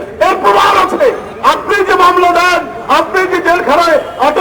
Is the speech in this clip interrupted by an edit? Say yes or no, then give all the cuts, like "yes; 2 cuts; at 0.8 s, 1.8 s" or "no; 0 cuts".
yes; 1 cut; at 1.3 s